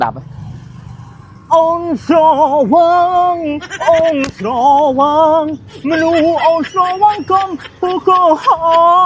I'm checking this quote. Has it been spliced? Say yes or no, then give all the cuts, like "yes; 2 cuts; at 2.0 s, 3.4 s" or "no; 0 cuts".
no; 0 cuts